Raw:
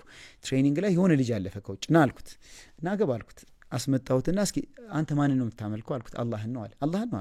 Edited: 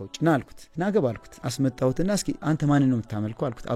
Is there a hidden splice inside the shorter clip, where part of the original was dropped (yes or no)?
yes